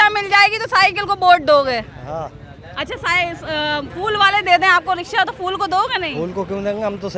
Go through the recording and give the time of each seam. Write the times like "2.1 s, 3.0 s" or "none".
none